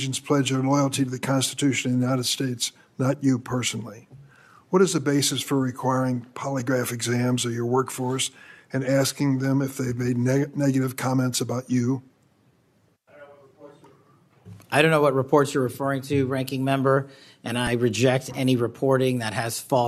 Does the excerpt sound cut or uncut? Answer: uncut